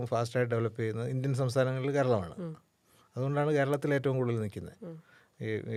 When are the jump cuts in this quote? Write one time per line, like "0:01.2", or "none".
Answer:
none

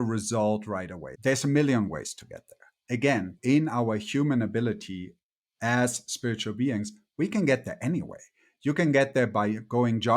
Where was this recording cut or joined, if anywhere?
0:01.1
0:03.3

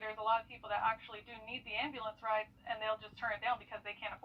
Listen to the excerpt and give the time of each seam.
none

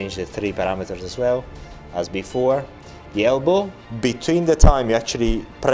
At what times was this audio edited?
0:03.8

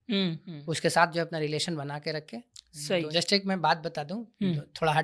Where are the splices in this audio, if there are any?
0:03.0

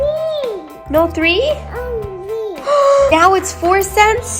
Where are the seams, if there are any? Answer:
0:03.1

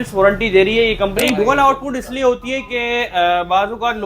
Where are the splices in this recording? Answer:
0:01.2

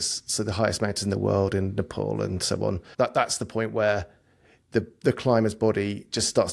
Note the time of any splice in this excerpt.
0:02.9

